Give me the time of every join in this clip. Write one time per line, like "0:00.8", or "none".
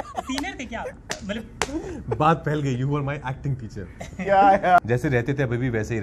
0:04.8